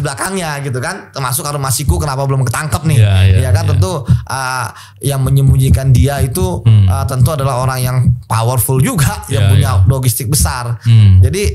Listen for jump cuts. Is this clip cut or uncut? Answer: uncut